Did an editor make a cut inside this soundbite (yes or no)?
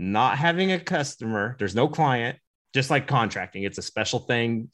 yes